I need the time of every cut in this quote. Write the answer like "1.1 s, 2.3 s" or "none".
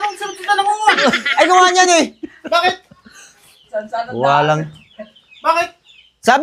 none